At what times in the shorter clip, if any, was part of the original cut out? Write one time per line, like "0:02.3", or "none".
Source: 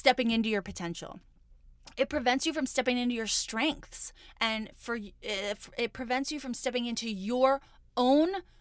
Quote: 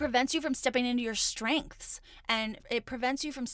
0:02.6